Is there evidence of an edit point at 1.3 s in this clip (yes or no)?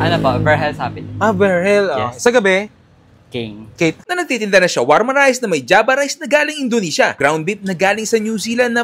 no